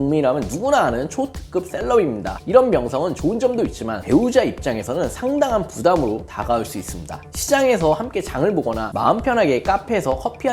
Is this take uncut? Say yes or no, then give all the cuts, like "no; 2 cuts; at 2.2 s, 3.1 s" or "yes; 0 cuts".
no; 1 cut; at 4.0 s